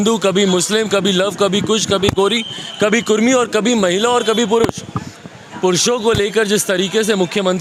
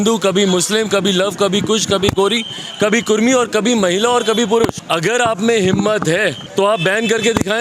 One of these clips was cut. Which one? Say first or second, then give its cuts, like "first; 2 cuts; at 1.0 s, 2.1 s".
second; 2 cuts; at 4.8 s, 6.4 s